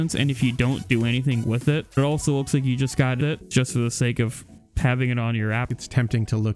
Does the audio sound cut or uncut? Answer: cut